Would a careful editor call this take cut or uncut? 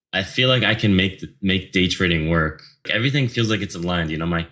cut